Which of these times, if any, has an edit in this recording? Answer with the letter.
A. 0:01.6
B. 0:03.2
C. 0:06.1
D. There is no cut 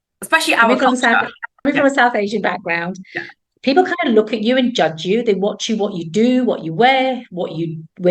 A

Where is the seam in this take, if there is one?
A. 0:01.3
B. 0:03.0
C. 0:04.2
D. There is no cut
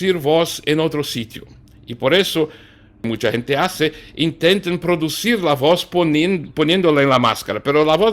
B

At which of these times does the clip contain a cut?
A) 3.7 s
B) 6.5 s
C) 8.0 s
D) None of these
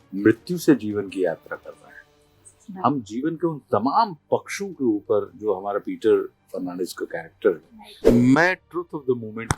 C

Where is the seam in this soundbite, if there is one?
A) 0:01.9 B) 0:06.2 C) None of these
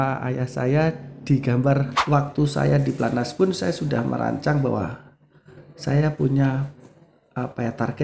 A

